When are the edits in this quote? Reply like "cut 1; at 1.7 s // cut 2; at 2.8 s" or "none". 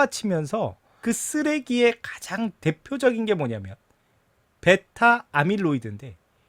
cut 1; at 1.0 s

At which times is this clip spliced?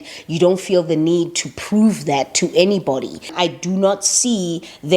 cut 1; at 3.3 s

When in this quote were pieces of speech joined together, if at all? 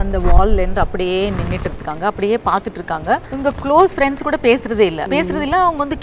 cut 1; at 3.3 s // cut 2; at 5.0 s

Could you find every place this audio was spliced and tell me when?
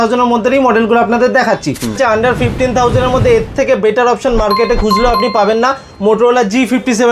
cut 1; at 2.0 s

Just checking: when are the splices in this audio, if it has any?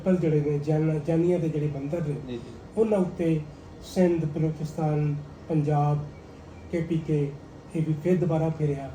none

